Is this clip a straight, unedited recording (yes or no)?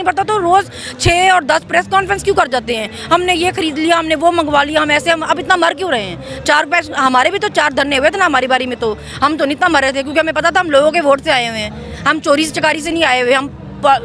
yes